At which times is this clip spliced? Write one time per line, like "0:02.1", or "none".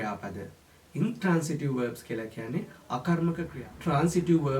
0:03.6